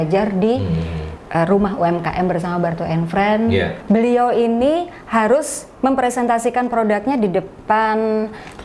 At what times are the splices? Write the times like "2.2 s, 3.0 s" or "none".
3.8 s